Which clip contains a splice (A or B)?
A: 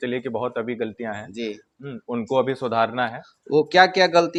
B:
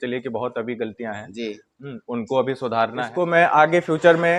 B